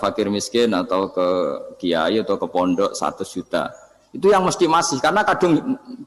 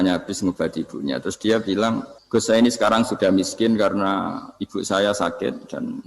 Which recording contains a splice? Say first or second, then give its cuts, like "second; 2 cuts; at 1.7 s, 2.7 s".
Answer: second; 1 cut; at 2.1 s